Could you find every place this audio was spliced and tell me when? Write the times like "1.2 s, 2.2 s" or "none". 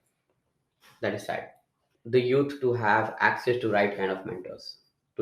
1.9 s